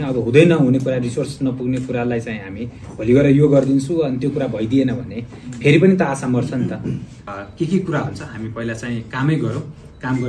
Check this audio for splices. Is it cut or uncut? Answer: cut